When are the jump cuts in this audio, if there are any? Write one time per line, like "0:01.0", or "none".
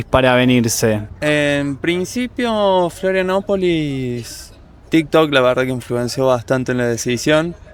none